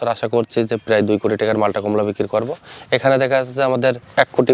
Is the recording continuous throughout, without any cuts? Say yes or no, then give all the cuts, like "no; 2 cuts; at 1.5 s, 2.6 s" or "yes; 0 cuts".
yes; 0 cuts